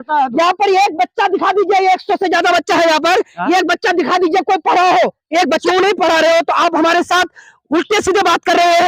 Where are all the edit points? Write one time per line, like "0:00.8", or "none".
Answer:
0:05.6